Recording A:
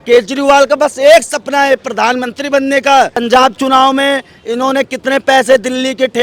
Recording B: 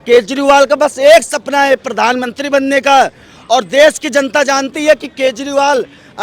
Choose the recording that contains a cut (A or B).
A